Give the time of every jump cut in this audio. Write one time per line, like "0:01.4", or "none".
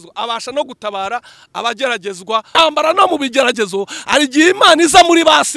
0:02.5